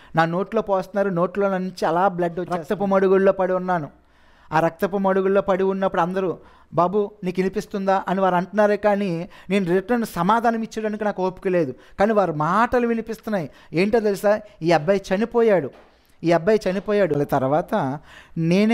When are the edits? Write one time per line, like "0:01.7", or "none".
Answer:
0:02.6
0:17.2